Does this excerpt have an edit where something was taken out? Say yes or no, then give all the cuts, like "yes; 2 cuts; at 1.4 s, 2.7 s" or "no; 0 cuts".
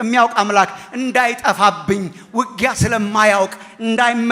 no; 0 cuts